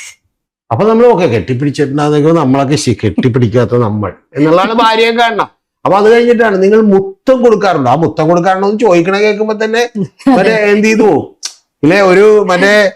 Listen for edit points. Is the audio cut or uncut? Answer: uncut